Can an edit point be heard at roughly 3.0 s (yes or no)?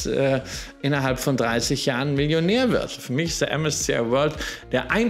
yes